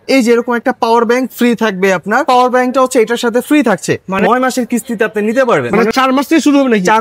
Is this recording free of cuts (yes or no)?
no